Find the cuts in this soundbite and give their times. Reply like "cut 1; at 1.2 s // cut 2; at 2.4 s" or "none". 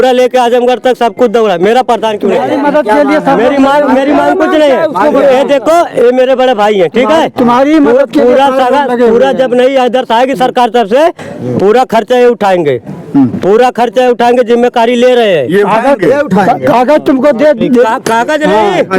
cut 1; at 2.3 s